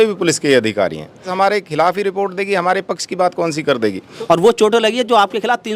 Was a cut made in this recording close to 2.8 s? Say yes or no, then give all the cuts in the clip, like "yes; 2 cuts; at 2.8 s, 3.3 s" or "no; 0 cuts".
no; 2 cuts; at 1.3 s, 4.1 s